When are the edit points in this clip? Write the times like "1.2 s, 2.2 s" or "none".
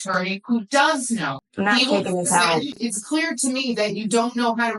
1.4 s, 2.8 s